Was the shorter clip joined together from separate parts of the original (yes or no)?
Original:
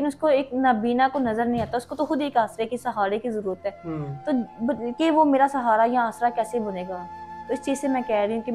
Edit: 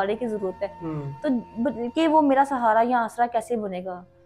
no